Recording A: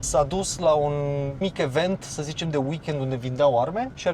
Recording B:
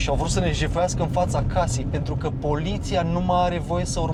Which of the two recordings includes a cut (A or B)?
A